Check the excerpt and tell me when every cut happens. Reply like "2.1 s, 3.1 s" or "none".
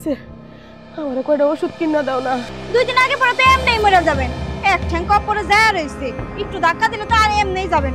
2.5 s